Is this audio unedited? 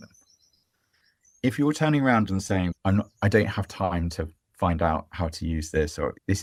yes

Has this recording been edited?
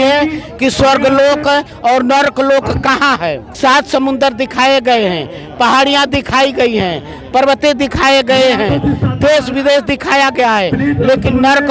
yes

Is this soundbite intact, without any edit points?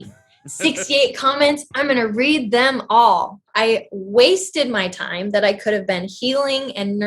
no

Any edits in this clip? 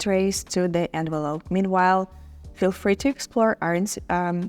no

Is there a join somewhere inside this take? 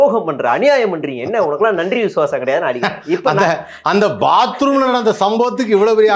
no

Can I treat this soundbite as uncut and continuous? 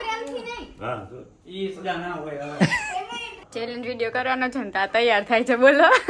no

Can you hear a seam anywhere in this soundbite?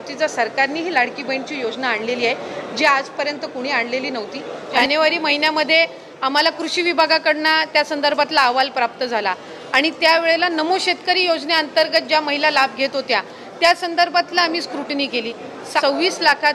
yes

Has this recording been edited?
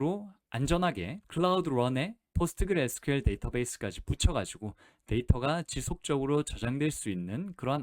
yes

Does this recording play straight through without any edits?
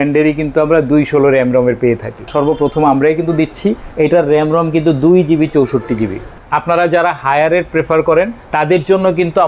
no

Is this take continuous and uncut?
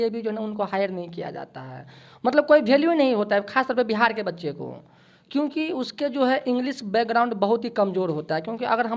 yes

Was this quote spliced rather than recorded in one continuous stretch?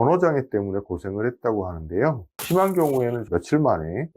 yes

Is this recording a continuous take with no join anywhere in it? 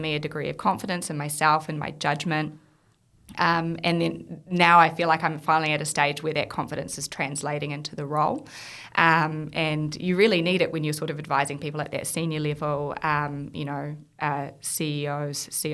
yes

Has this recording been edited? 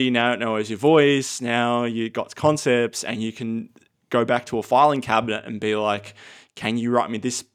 no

